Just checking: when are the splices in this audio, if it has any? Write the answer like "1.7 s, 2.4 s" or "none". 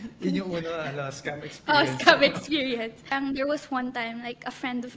3.1 s